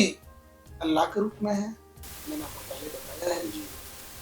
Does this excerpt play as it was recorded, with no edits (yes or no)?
yes